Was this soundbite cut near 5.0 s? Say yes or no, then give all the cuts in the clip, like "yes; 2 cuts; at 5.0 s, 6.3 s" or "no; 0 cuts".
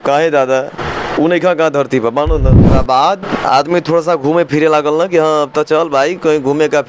no; 1 cut; at 2.7 s